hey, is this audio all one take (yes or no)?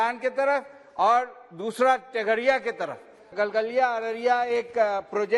no